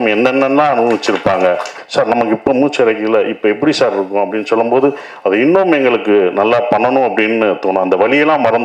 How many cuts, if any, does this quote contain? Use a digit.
1